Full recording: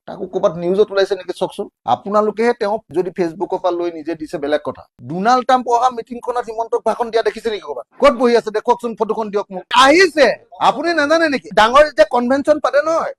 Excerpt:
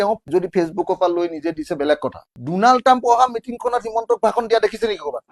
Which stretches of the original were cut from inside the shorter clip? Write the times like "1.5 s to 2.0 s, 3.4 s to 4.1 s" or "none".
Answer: none